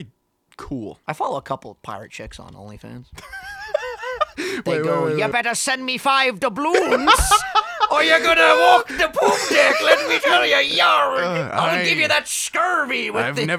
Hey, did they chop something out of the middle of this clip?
yes; 1 cut; at 1.0 s

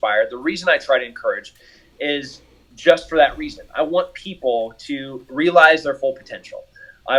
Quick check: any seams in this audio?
no; 0 cuts

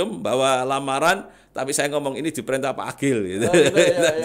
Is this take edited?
no; 0 cuts

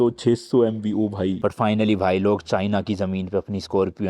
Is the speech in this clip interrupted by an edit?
yes; 1 cut; at 1.4 s

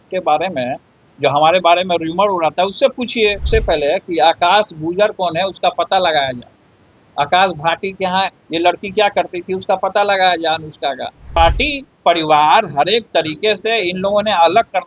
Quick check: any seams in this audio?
yes; 2 cuts; at 3.5 s, 11.4 s

